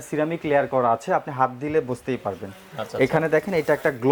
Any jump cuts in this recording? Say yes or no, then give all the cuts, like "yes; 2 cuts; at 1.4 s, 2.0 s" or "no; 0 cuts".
no; 0 cuts